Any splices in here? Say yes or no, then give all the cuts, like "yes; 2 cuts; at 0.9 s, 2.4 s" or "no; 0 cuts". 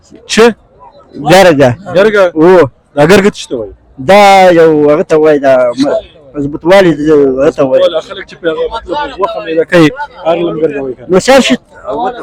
no; 0 cuts